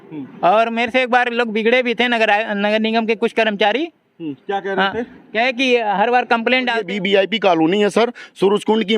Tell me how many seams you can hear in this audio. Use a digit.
1